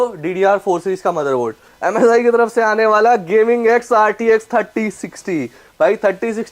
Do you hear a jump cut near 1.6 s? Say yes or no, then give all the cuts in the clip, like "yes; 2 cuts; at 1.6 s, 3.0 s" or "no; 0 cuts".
yes; 1 cut; at 1.6 s